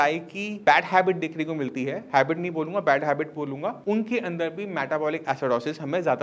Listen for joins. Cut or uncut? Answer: uncut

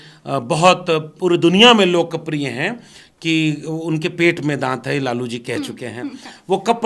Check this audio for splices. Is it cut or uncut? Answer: uncut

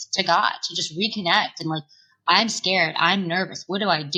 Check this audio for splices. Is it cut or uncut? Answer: uncut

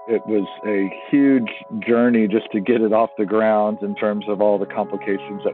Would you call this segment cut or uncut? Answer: uncut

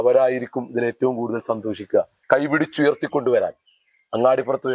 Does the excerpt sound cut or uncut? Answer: cut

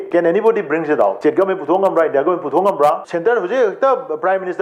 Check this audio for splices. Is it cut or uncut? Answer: cut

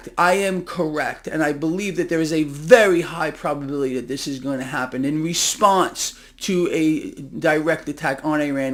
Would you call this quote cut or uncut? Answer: uncut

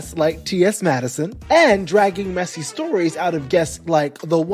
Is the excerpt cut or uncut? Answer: cut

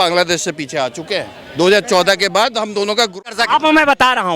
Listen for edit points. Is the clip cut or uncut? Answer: cut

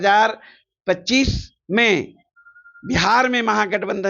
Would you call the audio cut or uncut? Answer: cut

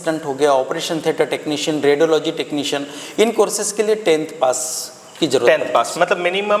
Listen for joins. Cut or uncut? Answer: uncut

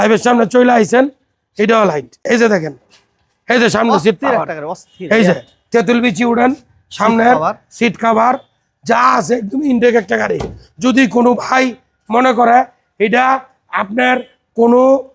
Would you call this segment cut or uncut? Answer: uncut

